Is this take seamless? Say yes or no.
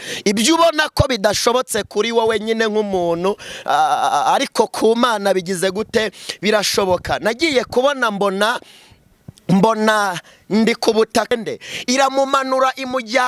no